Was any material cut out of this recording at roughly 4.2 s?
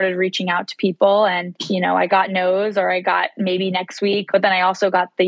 yes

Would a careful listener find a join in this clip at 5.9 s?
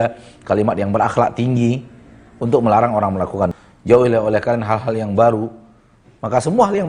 no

